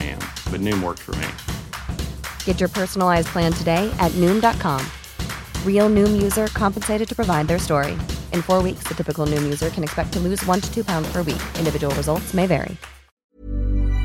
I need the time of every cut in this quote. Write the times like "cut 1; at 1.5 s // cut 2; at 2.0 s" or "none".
cut 1; at 13.0 s